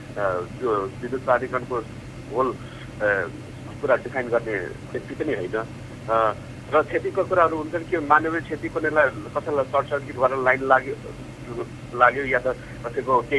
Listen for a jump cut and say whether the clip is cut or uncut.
uncut